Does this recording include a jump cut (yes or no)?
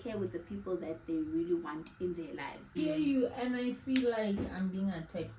yes